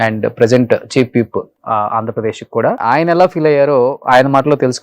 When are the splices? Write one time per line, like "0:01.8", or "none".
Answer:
0:02.8